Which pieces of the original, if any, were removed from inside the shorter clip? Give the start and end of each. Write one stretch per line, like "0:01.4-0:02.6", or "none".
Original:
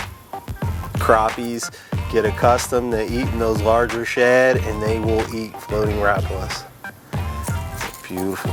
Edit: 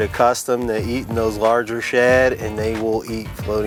none